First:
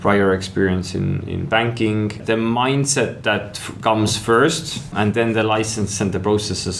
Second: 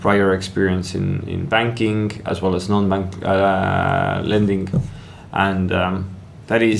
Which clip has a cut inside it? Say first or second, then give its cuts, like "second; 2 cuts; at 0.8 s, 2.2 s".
first; 2 cuts; at 2.2 s, 4.9 s